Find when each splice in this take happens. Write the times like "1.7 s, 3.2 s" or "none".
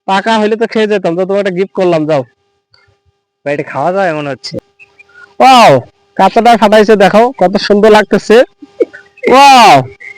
4.5 s